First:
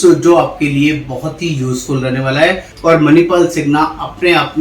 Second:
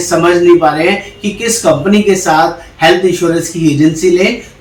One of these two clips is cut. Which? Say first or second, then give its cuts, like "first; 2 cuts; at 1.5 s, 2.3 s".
first; 1 cut; at 2.7 s